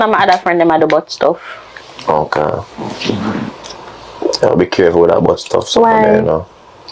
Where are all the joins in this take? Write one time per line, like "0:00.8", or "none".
none